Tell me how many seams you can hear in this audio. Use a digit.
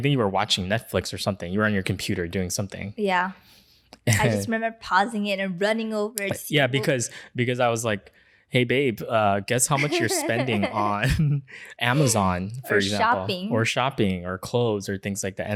0